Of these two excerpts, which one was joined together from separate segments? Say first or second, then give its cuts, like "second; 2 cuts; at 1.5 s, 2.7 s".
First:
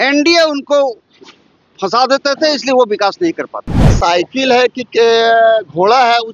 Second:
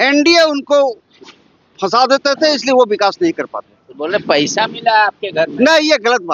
first; 1 cut; at 3.9 s